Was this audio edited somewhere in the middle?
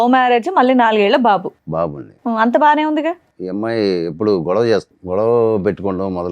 yes; 2 cuts; at 3.3 s, 4.9 s

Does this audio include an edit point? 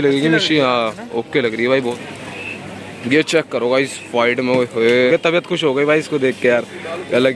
yes; 2 cuts; at 1.9 s, 5.1 s

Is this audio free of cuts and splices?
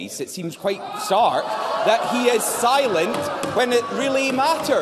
yes; 0 cuts

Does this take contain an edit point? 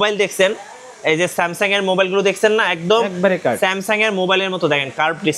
no; 0 cuts

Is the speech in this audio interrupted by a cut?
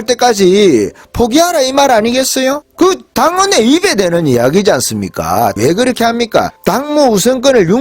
yes; 3 cuts; at 2.7 s, 5.5 s, 6.5 s

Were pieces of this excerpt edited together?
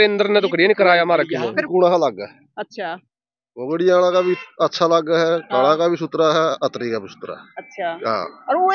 yes; 1 cut; at 1.5 s

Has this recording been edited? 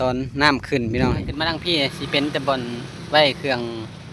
yes; 1 cut; at 1.6 s

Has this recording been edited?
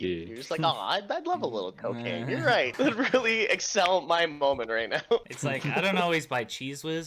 yes; 2 cuts; at 2.7 s, 5.3 s

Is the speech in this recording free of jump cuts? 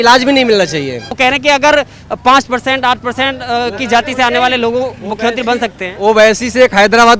yes; 0 cuts

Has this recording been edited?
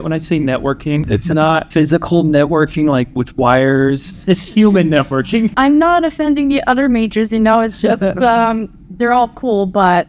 yes; 3 cuts; at 1.1 s, 4.1 s, 5.5 s

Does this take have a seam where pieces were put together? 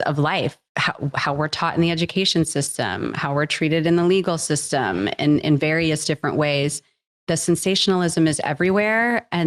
no; 0 cuts

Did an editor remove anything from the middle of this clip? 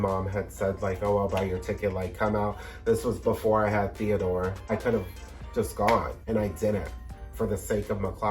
yes; 2 cuts; at 4.7 s, 6.2 s

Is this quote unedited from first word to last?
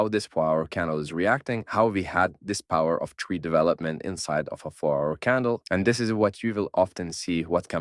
no; 1 cut; at 5.6 s

